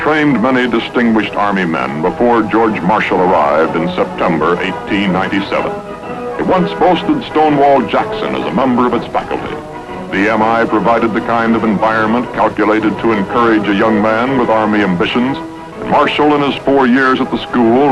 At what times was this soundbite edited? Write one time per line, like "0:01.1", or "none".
0:15.2